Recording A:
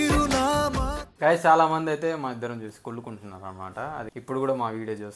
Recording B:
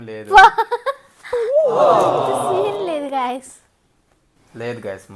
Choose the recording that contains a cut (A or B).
A